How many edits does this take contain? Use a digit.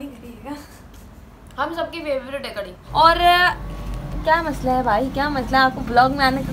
1